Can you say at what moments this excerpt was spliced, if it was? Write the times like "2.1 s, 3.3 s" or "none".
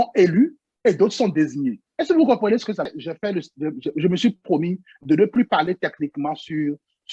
2.9 s

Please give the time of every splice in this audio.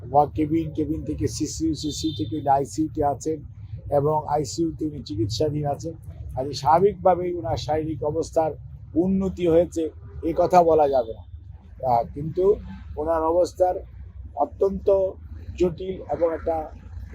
none

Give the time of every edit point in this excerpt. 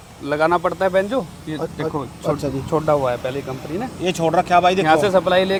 none

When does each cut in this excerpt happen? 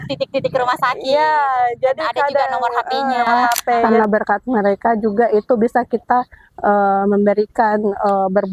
3.8 s

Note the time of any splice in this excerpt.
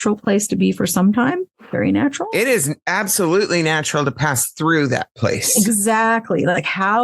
1.5 s

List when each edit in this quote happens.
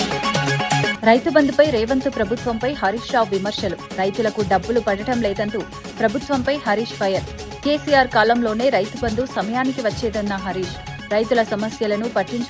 0.9 s

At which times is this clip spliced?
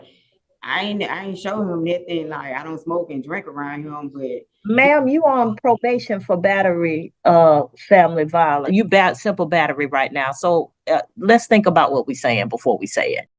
8.6 s

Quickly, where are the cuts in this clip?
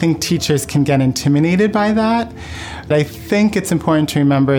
2.9 s

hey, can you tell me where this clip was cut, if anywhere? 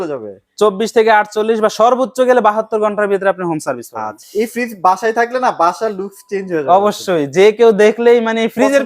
4.2 s

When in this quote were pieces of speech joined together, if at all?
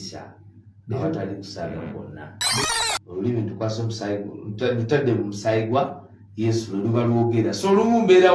2.6 s

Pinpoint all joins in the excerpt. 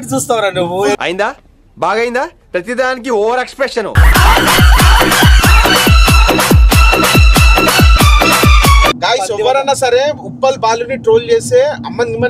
1.0 s, 8.9 s

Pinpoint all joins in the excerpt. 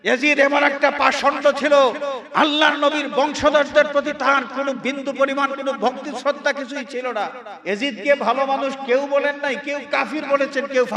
7.5 s

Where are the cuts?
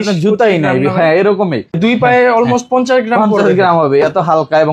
1.8 s

